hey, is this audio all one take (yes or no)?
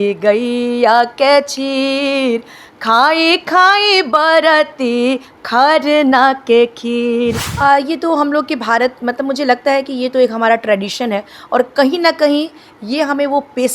no